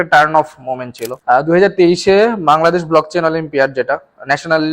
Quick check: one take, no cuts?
no; 1 cut; at 1.2 s

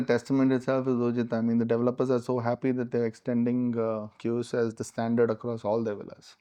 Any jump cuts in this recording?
no; 0 cuts

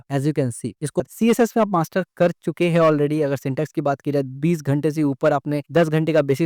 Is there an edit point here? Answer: yes; 1 cut; at 1.0 s

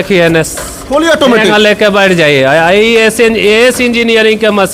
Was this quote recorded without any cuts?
yes; 0 cuts

